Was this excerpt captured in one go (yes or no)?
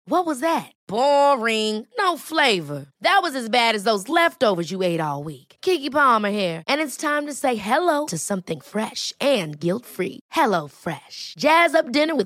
yes